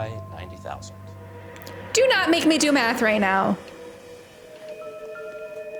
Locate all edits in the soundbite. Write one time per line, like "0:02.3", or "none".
none